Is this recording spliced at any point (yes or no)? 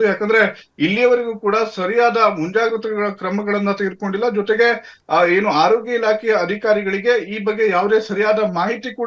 no